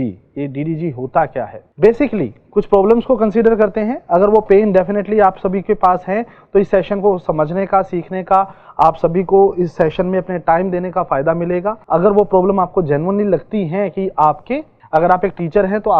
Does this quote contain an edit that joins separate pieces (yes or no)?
yes